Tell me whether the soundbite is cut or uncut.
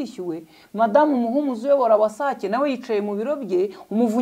uncut